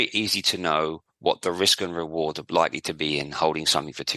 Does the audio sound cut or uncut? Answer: uncut